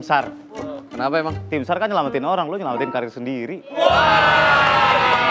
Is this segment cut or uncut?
uncut